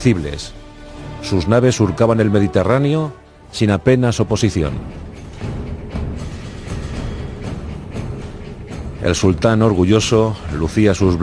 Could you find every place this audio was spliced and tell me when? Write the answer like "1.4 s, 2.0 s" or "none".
none